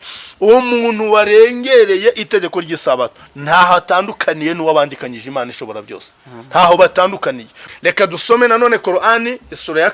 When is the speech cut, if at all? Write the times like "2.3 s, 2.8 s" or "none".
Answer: 7.6 s